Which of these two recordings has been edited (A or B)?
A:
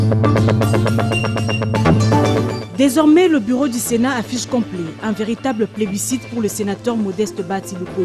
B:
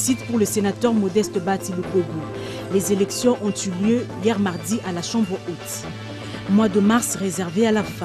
A